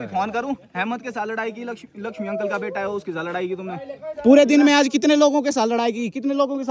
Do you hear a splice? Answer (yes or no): no